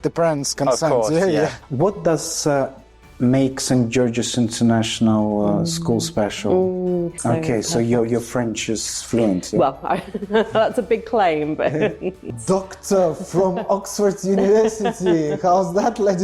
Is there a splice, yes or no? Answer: yes